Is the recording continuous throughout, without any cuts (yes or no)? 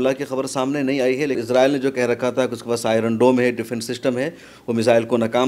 no